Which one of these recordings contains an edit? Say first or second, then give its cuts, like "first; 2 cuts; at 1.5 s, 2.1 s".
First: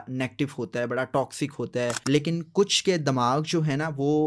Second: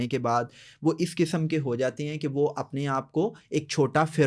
first; 1 cut; at 2.0 s